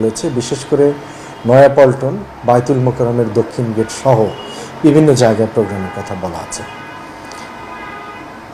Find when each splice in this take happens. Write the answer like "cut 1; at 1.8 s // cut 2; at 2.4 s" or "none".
none